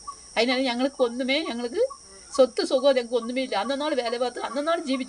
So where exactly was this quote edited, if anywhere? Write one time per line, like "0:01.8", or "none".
none